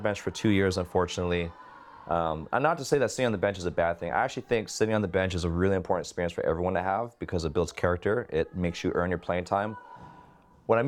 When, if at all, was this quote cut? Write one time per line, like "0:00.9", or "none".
none

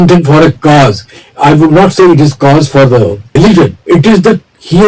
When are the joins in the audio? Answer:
0:03.3

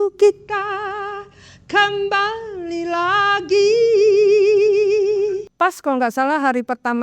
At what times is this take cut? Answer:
0:05.4

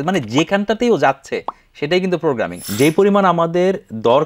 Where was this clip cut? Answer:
0:02.6

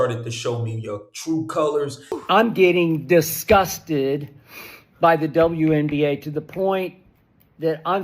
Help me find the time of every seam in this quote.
0:02.2

